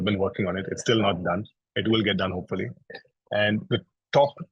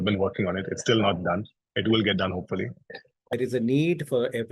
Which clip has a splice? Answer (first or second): second